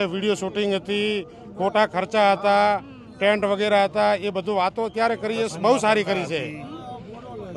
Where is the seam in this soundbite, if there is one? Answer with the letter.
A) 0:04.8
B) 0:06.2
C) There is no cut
C